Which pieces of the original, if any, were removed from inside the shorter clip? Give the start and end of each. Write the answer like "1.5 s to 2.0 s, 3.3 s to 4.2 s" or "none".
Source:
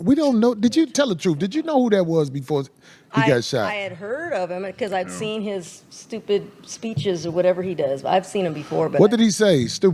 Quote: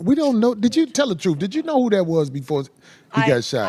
none